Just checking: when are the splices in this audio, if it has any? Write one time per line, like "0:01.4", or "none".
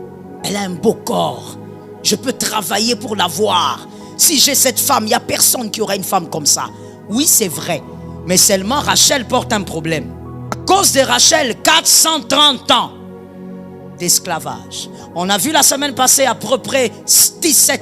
0:10.6